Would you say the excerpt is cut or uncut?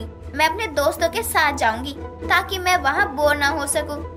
uncut